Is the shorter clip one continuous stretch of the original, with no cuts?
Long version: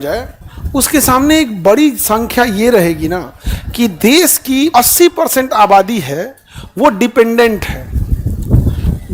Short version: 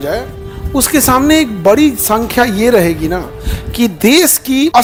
yes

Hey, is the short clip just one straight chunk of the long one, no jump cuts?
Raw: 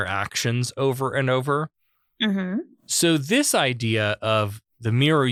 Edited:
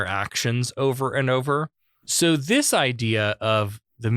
no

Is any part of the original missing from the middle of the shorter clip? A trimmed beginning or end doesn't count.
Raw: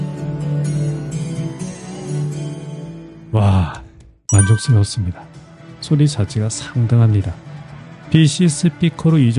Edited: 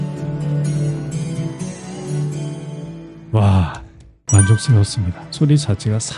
yes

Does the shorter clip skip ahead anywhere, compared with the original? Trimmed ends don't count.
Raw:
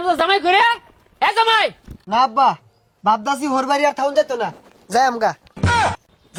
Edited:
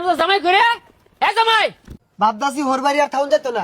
yes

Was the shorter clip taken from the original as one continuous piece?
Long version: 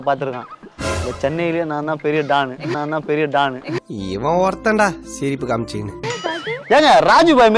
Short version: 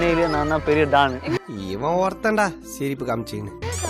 no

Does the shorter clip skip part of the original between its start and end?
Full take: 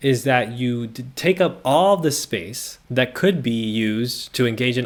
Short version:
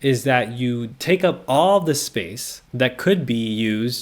yes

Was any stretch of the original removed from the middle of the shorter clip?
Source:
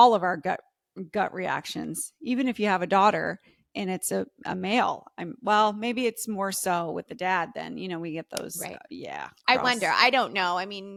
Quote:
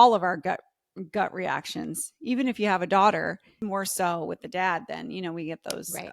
yes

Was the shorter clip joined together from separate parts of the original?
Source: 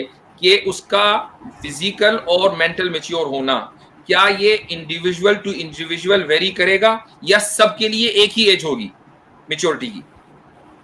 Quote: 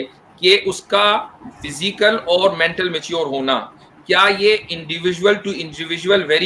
no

